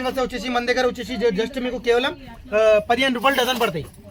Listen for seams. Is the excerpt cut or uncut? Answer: uncut